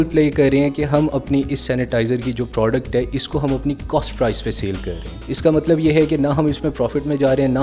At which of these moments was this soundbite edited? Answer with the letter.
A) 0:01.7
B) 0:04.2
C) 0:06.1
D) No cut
D